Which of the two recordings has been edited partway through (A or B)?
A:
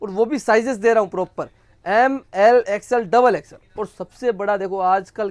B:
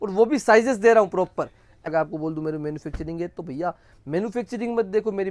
B